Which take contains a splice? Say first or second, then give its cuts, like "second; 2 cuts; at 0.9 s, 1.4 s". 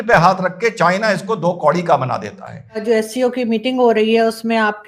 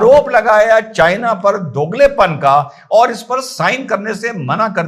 first; 1 cut; at 2.8 s